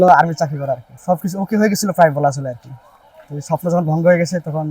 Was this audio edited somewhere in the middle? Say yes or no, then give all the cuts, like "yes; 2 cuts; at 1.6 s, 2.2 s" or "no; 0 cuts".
yes; 1 cut; at 0.9 s